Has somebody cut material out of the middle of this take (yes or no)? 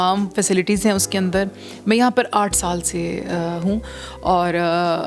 no